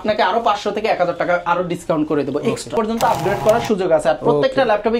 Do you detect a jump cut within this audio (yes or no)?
yes